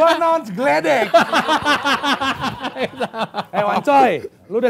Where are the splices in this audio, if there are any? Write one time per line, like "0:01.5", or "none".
none